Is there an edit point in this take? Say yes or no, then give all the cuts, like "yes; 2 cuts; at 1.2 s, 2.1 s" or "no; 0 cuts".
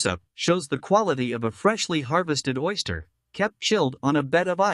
no; 0 cuts